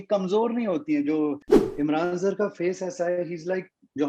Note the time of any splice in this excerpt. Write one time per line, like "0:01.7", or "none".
0:01.5